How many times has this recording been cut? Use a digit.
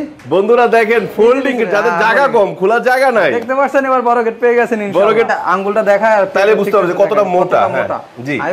1